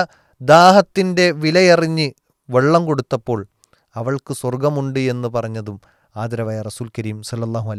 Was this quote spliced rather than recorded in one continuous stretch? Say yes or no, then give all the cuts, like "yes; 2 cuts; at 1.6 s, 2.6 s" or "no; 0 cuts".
no; 0 cuts